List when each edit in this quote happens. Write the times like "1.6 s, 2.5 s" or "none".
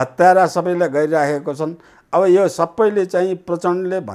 none